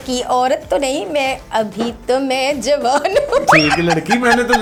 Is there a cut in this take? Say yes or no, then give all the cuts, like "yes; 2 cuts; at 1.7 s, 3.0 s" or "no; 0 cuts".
no; 0 cuts